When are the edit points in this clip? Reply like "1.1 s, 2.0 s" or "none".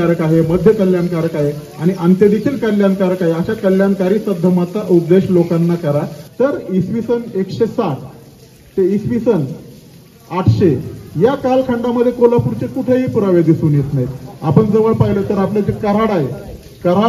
6.2 s